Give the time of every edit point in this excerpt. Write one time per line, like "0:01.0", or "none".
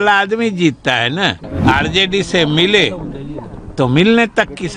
0:01.5